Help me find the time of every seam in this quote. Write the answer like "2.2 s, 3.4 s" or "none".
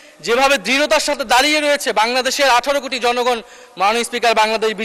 none